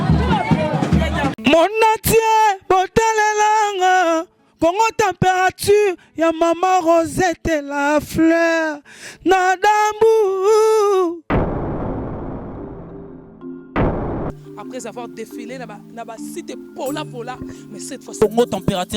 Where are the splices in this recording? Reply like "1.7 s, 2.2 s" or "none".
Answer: 1.4 s